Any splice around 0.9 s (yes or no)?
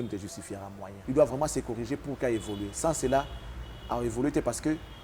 yes